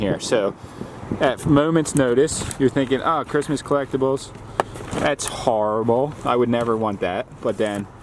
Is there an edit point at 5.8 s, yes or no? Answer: no